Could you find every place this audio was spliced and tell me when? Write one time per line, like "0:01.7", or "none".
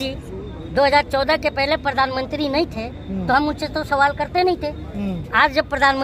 none